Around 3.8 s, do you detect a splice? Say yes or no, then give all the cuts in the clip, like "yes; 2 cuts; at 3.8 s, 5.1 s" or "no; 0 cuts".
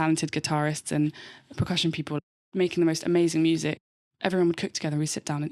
yes; 2 cuts; at 2.2 s, 3.8 s